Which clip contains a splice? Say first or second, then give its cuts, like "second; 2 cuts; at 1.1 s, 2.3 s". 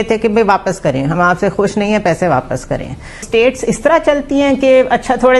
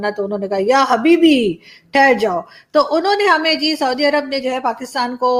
first; 1 cut; at 3.2 s